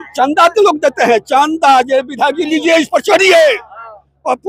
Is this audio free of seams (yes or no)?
yes